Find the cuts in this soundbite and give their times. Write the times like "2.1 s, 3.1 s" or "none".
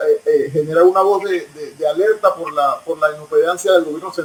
none

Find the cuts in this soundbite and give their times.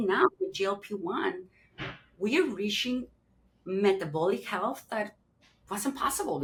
none

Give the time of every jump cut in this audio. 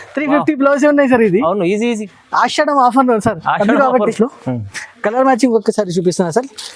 4.1 s

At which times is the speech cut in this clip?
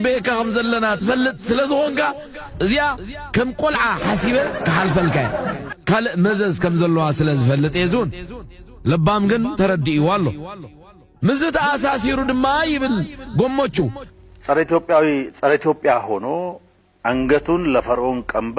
none

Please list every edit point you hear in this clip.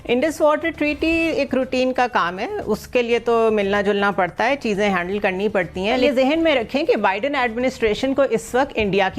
6.0 s

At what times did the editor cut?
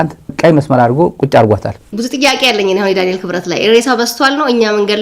1.8 s

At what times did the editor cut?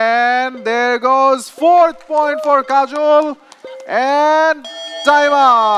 none

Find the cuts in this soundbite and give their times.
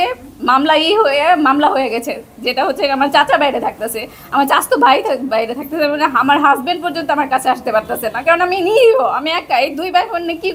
none

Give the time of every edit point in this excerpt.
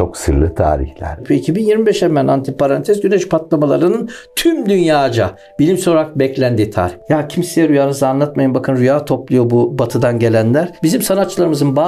1.2 s, 7.0 s, 10.7 s

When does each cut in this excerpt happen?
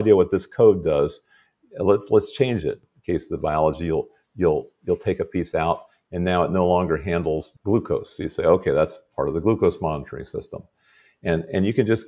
2.9 s, 7.5 s

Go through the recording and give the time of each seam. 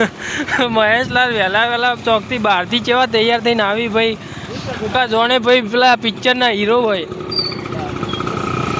none

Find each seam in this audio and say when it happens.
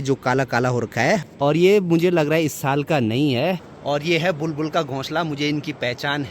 1.3 s, 3.6 s

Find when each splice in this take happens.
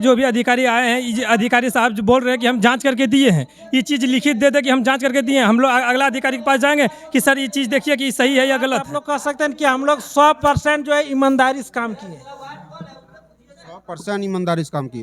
8.9 s

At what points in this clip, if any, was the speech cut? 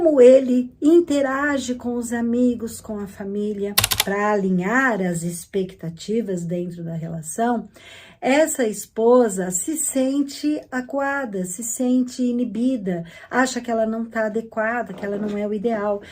3.8 s

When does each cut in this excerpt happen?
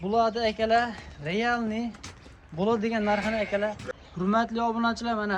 3.9 s

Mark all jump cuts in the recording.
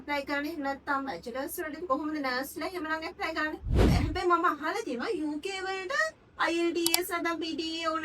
3.8 s

